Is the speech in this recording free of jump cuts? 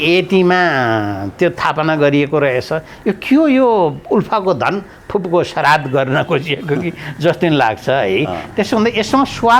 yes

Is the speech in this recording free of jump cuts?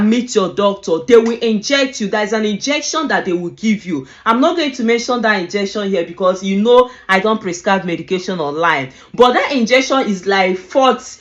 yes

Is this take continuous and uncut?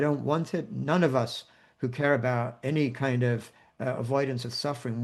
yes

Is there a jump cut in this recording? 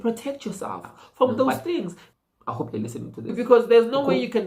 yes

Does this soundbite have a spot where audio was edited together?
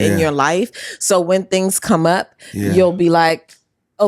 no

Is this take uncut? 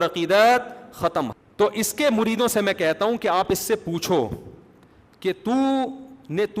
no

